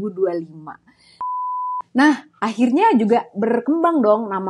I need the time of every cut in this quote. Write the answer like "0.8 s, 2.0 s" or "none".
1.4 s